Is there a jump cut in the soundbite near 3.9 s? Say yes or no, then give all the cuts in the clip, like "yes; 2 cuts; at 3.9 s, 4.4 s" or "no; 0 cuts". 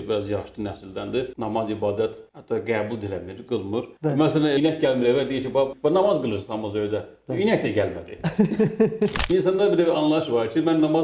yes; 4 cuts; at 3.9 s, 4.6 s, 5.7 s, 9.2 s